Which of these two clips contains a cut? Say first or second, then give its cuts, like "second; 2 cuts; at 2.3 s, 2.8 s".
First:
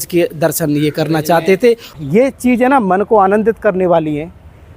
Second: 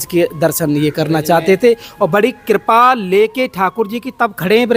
first; 1 cut; at 1.9 s